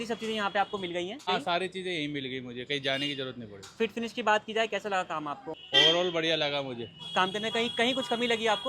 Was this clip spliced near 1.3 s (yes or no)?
yes